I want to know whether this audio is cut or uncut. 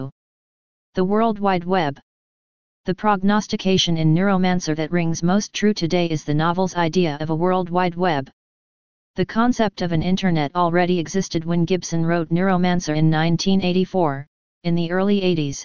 cut